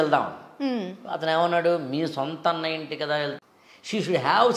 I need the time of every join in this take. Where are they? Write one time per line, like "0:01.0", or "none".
0:03.4